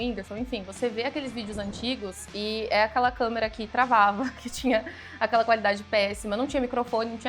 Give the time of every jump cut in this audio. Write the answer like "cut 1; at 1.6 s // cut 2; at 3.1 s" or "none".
none

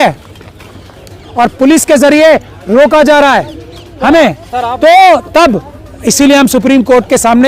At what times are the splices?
cut 1; at 1.0 s

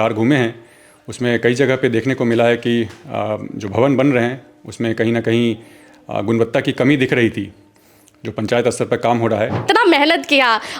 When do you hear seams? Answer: cut 1; at 9.6 s

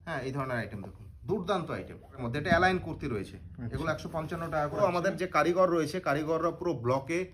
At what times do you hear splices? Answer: cut 1; at 2.2 s // cut 2; at 4.8 s

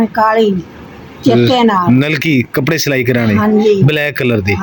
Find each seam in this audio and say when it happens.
none

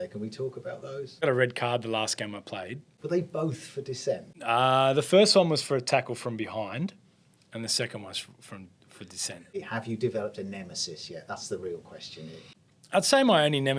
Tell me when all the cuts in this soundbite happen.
cut 1; at 1.2 s // cut 2; at 2.9 s // cut 3; at 9.6 s // cut 4; at 12.6 s

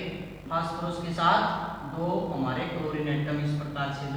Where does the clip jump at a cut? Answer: none

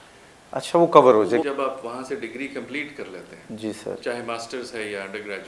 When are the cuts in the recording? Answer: cut 1; at 1.4 s

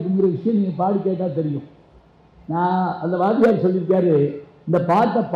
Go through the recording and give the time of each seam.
none

